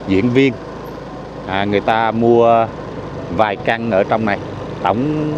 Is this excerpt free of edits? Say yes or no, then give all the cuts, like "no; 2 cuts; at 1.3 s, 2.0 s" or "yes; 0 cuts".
yes; 0 cuts